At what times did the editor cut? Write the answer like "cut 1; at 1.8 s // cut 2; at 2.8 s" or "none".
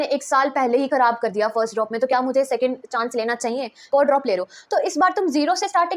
cut 1; at 3.8 s